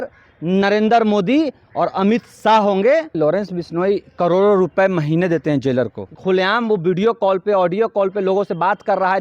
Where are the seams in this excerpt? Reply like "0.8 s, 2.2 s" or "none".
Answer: 3.1 s, 6.1 s